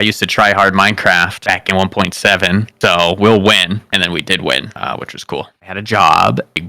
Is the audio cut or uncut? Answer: cut